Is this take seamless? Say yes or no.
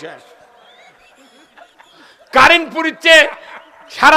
yes